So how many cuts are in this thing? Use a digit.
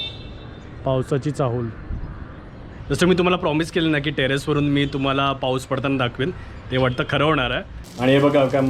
2